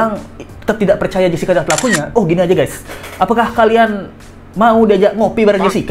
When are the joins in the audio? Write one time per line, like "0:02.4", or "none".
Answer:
none